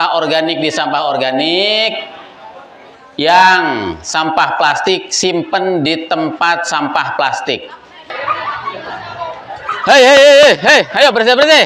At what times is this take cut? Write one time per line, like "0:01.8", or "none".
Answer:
0:08.1